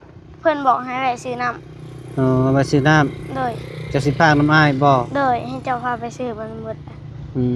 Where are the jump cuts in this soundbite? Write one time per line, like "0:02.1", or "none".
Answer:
none